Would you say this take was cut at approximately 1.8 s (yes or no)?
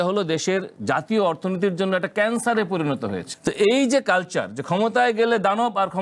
no